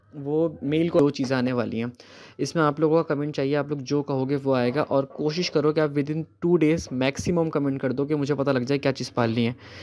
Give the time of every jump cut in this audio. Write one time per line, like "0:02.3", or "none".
0:01.0